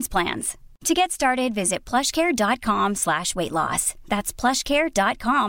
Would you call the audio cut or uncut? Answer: uncut